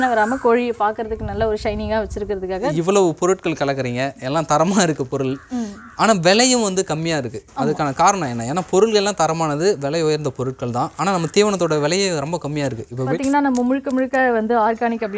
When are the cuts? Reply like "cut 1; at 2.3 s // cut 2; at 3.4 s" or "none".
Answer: cut 1; at 2.7 s // cut 2; at 13.1 s

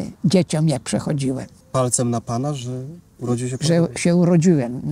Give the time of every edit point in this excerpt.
cut 1; at 1.6 s

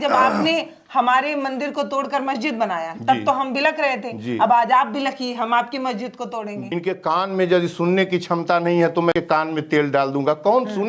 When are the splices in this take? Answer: cut 1; at 6.7 s // cut 2; at 9.1 s

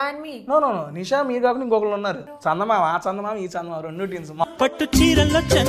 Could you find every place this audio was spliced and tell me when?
cut 1; at 2.3 s // cut 2; at 4.4 s

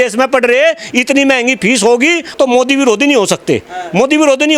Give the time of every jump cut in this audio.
cut 1; at 2.3 s

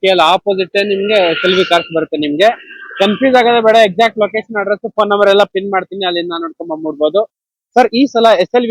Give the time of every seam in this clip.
none

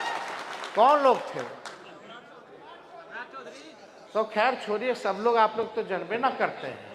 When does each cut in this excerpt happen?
none

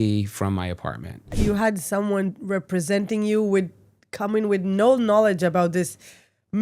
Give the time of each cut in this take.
cut 1; at 1.3 s

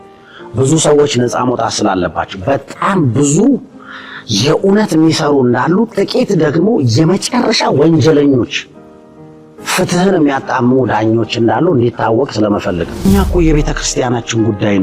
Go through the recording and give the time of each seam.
cut 1; at 13.1 s

